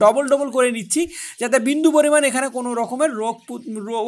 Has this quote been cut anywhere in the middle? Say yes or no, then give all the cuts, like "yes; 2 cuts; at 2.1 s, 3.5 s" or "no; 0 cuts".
no; 0 cuts